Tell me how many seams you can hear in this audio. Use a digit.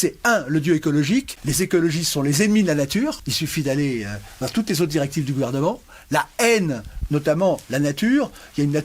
2